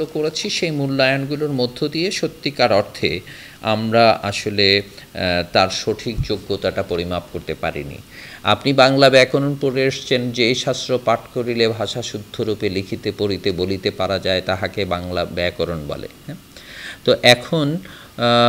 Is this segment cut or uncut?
uncut